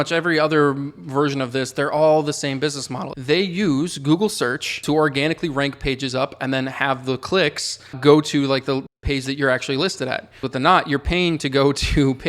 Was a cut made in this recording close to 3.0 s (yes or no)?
yes